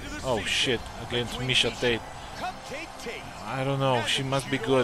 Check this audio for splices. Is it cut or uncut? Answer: uncut